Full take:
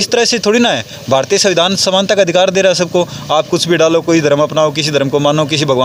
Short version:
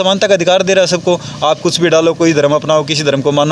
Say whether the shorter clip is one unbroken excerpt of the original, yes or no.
yes